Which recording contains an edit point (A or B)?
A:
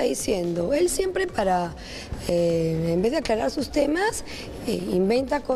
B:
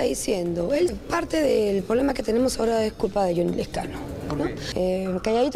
B